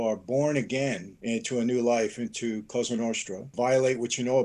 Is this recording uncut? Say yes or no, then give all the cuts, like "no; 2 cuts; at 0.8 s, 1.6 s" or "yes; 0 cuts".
no; 2 cuts; at 1.1 s, 3.5 s